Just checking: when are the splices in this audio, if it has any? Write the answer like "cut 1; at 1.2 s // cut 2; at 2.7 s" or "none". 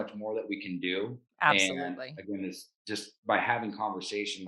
none